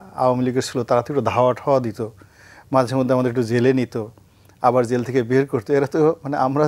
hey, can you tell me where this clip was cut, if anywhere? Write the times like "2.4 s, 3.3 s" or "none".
none